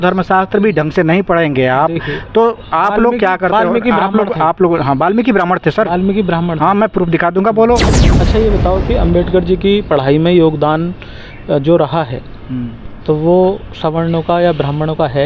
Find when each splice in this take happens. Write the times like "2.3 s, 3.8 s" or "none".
8.0 s

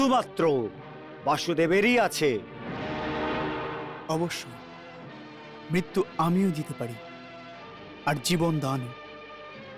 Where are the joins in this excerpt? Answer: none

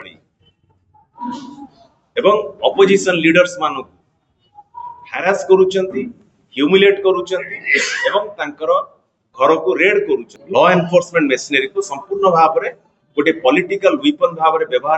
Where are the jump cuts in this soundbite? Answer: 10.4 s

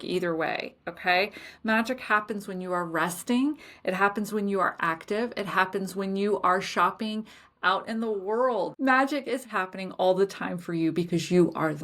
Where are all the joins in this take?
8.7 s

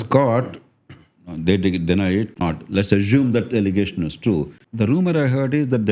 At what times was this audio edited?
2.4 s, 4.6 s

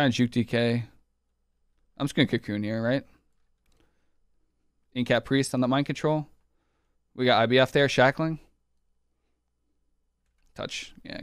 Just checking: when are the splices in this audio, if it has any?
none

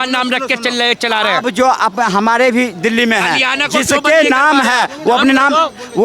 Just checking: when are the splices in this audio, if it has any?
none

